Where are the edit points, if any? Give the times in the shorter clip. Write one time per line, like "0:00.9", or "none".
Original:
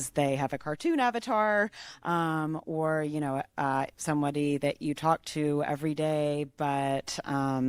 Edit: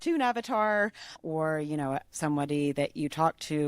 0:01.2
0:02.1